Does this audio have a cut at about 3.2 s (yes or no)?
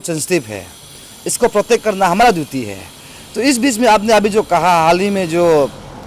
no